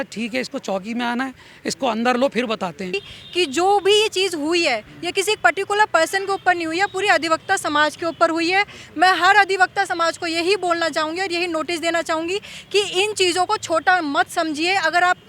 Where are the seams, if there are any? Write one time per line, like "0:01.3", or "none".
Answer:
0:02.9